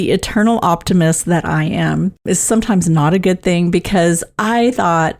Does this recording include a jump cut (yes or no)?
yes